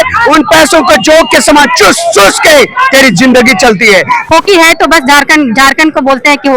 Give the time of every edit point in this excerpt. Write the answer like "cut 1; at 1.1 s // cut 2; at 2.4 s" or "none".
cut 1; at 4.2 s